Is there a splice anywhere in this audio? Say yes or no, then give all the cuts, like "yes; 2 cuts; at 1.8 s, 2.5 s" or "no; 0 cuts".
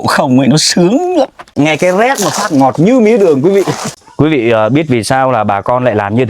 yes; 2 cuts; at 1.4 s, 3.8 s